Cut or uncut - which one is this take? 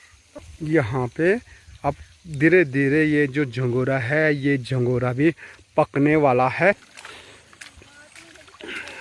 cut